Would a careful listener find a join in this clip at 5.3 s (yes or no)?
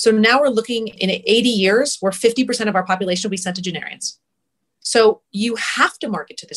no